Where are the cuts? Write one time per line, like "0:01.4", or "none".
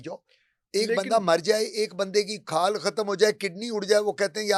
none